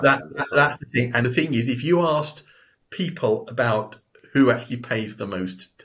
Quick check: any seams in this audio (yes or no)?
yes